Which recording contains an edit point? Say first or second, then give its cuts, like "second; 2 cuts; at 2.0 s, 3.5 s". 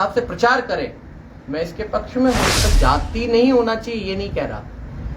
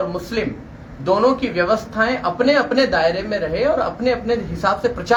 first; 1 cut; at 2.7 s